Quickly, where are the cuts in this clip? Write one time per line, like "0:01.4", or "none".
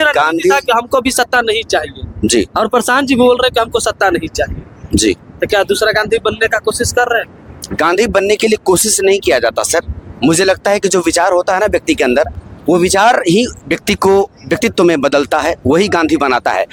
none